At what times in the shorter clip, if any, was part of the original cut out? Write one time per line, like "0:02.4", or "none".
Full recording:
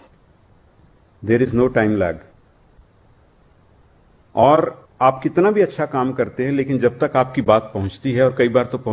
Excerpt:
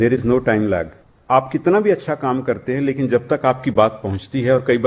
0:01.1